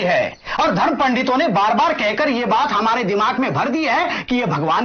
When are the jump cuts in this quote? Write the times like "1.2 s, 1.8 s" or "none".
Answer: none